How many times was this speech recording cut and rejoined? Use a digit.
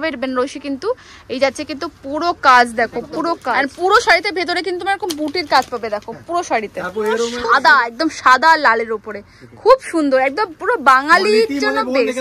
2